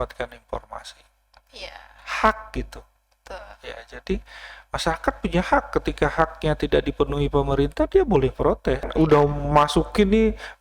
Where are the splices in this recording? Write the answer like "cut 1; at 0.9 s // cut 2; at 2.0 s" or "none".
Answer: cut 1; at 8.9 s